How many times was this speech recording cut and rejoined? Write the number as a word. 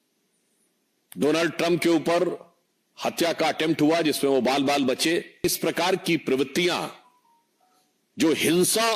one